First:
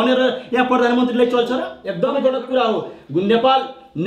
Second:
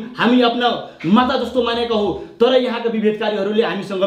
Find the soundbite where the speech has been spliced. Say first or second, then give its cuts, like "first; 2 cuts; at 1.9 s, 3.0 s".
first; 1 cut; at 1.8 s